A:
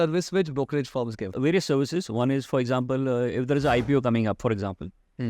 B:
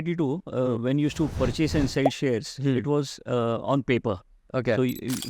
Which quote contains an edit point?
A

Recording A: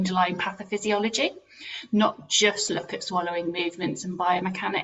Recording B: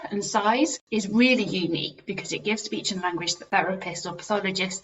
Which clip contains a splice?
B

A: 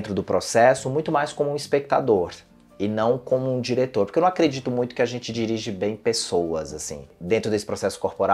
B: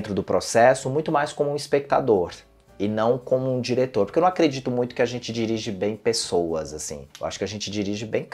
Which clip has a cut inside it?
A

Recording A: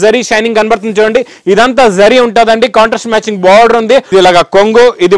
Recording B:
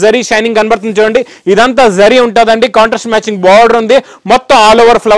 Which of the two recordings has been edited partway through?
A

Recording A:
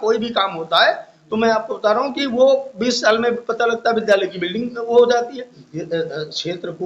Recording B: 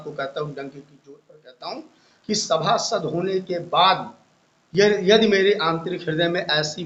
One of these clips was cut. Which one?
A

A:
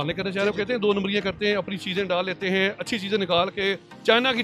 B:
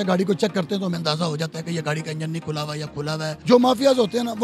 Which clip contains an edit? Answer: B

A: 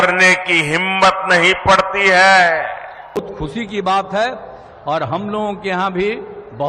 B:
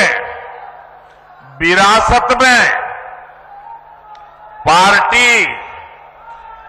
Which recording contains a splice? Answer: A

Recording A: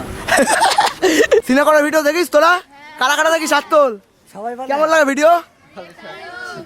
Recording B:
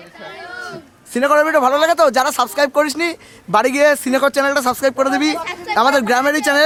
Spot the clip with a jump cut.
A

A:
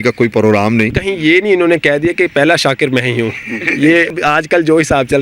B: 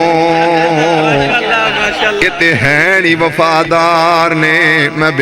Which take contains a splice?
A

